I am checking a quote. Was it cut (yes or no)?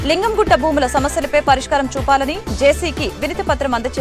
no